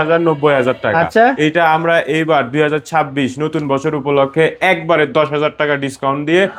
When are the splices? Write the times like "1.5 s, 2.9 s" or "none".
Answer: none